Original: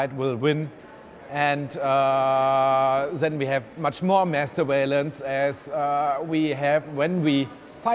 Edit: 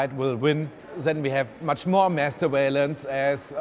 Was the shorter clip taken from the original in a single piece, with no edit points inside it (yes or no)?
no